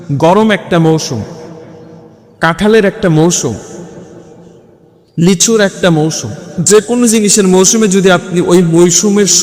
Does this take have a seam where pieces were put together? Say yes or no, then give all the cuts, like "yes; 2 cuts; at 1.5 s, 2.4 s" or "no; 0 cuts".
no; 0 cuts